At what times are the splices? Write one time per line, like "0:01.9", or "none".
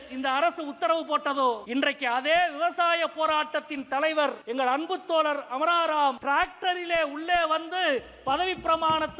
0:01.6
0:04.4
0:06.2